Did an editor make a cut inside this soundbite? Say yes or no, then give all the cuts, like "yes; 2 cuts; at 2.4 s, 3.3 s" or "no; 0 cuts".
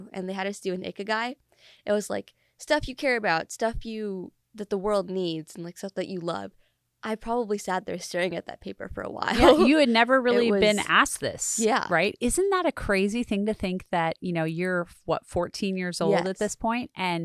no; 0 cuts